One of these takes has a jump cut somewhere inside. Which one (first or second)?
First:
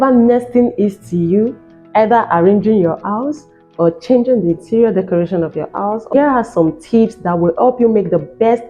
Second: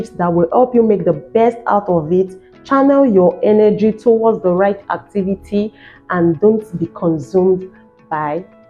first